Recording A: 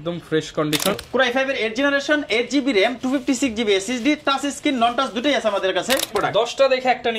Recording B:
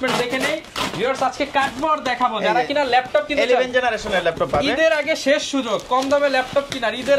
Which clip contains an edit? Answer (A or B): A